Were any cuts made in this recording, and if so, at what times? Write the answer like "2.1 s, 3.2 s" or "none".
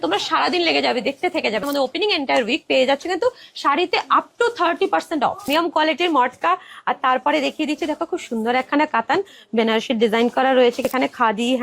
1.6 s, 5.5 s, 10.9 s